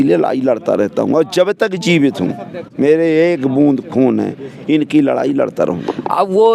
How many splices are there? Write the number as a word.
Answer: zero